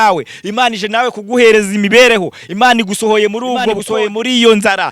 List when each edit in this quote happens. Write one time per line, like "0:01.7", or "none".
0:03.8